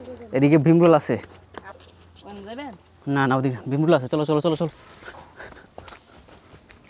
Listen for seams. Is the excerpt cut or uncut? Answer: cut